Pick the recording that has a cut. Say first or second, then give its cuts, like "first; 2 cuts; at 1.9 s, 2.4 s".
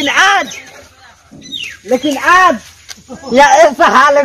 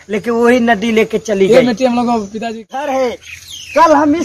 second; 1 cut; at 2.6 s